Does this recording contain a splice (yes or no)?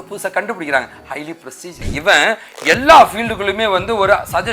yes